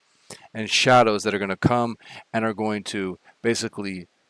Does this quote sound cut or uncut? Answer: uncut